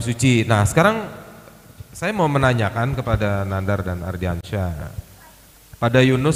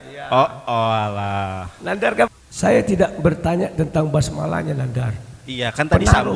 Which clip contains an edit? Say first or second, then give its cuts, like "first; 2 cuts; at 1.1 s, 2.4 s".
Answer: second; 1 cut; at 2.3 s